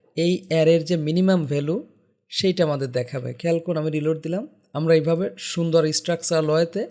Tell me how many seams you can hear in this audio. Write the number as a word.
one